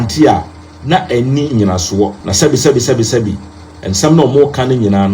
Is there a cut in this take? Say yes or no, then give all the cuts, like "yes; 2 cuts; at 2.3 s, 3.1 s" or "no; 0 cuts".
yes; 1 cut; at 2.2 s